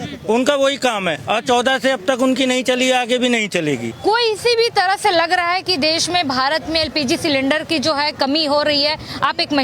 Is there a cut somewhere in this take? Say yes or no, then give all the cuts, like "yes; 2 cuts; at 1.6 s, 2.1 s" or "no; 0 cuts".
yes; 1 cut; at 3.9 s